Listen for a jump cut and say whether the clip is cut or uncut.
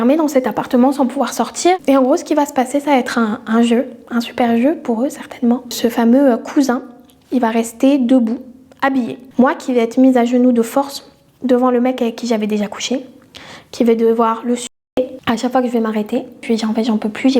cut